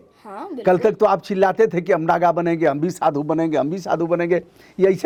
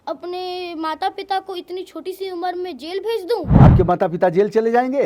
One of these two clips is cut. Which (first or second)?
second